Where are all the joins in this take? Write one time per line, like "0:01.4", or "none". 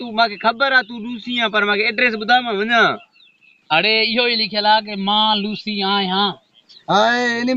0:06.7